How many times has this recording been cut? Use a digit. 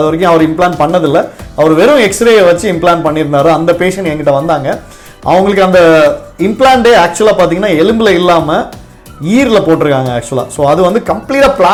0